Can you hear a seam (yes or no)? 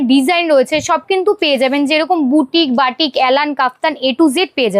no